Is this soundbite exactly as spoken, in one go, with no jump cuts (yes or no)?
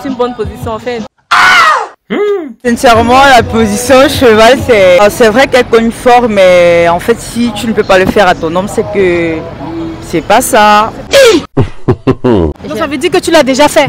no